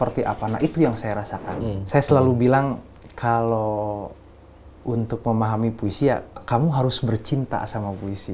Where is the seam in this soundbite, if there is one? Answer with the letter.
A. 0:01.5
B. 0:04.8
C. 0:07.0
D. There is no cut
A